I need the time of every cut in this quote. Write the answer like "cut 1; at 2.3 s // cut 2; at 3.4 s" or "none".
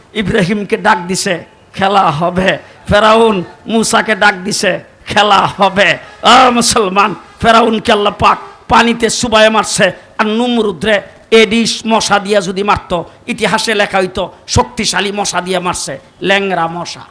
none